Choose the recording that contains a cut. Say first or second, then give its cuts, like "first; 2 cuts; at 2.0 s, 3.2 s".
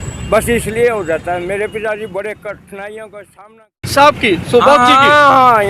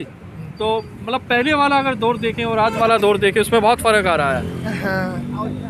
first; 1 cut; at 3.8 s